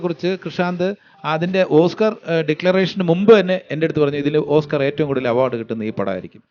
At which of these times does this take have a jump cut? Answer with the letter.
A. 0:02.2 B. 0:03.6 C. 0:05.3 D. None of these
D